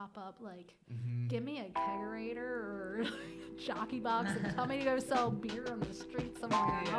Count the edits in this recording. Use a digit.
0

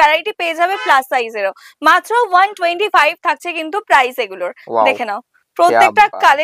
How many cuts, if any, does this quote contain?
0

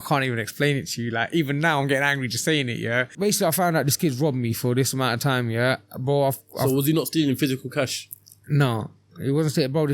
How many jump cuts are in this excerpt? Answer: 1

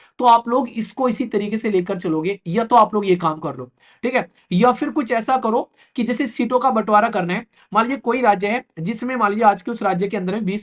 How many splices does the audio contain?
0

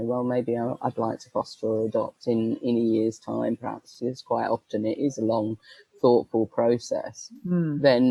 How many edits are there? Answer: 0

